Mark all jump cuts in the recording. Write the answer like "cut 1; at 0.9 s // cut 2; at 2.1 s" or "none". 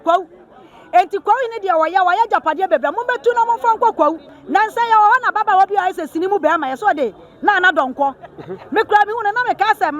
cut 1; at 4.3 s